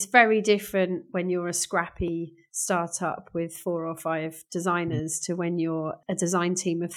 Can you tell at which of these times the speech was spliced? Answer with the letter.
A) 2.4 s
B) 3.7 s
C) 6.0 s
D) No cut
C